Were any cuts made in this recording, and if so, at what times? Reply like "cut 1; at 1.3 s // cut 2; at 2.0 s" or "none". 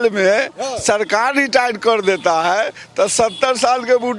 none